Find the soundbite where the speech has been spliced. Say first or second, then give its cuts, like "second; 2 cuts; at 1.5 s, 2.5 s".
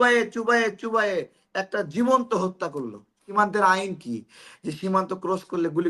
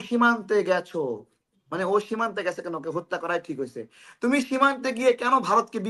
first; 1 cut; at 3.3 s